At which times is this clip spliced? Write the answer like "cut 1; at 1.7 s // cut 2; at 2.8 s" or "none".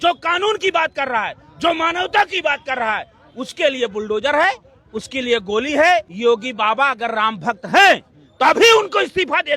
cut 1; at 6.1 s